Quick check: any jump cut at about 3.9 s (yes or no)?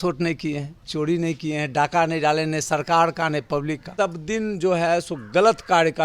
yes